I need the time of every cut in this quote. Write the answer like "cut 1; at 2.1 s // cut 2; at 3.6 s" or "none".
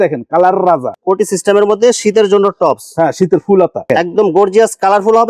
cut 1; at 0.9 s // cut 2; at 3.9 s